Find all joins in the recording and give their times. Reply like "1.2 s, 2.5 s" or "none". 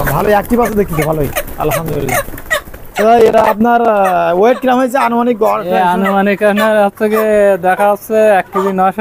none